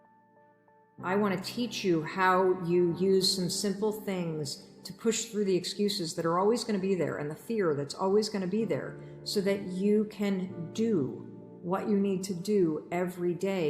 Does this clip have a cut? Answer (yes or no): yes